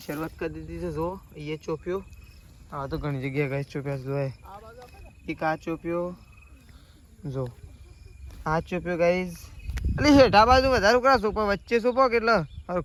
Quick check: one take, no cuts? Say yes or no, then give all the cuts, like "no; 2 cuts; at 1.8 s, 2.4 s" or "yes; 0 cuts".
yes; 0 cuts